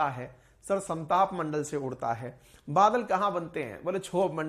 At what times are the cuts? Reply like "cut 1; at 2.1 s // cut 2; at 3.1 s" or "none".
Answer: none